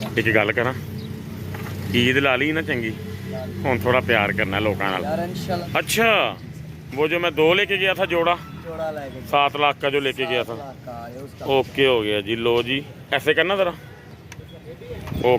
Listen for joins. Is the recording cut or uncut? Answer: cut